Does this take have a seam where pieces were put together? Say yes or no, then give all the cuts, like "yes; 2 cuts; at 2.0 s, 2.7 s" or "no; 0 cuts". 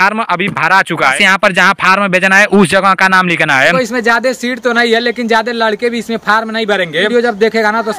yes; 3 cuts; at 1.1 s, 3.7 s, 7.1 s